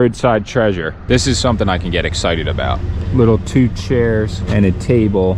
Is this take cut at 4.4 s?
yes; 3 cuts; at 0.9 s, 2.9 s, 4.4 s

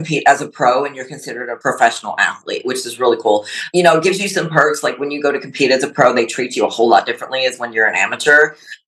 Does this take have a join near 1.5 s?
yes; 1 cut; at 1.5 s

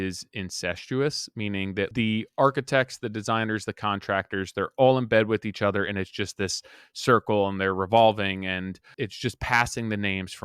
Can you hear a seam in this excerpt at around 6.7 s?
no; 2 cuts; at 1.9 s, 8.8 s

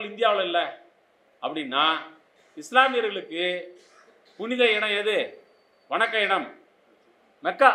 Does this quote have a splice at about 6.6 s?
no; 0 cuts

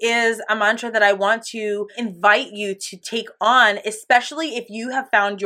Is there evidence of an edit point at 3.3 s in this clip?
no; 1 cut; at 1.9 s

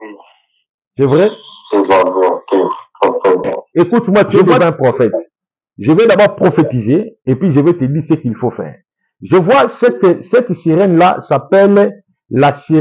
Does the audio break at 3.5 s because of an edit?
yes; 1 cut; at 3.5 s

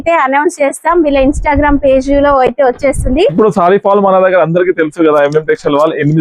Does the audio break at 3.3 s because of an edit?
yes; 1 cut; at 3.3 s

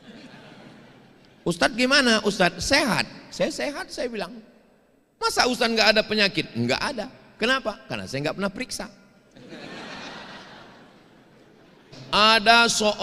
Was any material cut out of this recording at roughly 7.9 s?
no; 1 cut; at 12.0 s

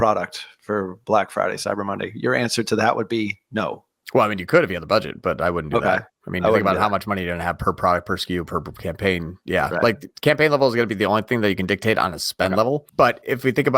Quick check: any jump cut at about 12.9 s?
yes; 1 cut; at 12.9 s

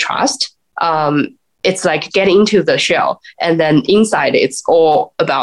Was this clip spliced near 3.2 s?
no; 0 cuts

